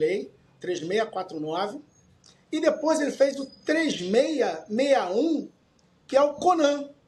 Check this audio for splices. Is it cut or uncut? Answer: uncut